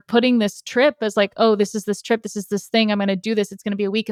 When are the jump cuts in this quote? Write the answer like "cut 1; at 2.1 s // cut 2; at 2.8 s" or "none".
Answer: none